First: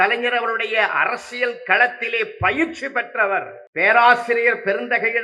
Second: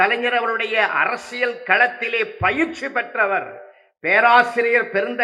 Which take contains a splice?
first; 1 cut; at 3.6 s

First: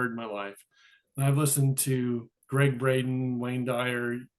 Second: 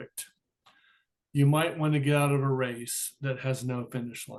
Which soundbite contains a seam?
first; 1 cut; at 2.3 s

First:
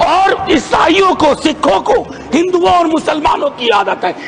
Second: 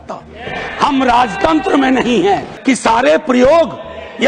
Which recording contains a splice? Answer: second; 1 cut; at 2.5 s

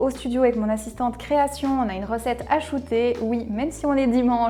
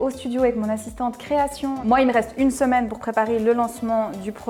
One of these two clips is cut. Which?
second; 1 cut; at 1.8 s

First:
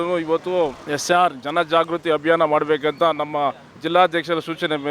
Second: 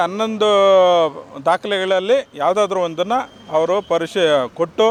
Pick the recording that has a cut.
first; 1 cut; at 3.7 s

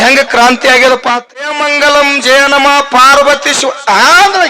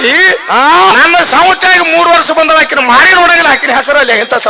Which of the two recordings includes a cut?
first; 1 cut; at 1.5 s

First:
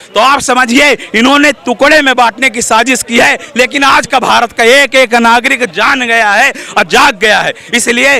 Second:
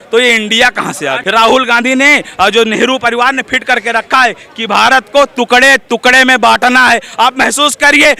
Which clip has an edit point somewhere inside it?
second; 1 cut; at 1.2 s

